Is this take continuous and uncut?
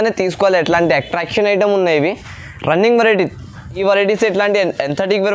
no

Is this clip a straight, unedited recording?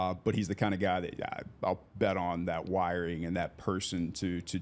yes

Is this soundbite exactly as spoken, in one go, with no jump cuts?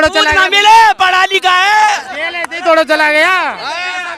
yes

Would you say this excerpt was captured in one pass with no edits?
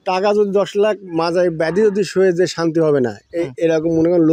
yes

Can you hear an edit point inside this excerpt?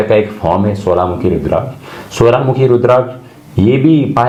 no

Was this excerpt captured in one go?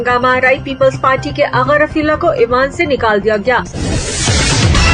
no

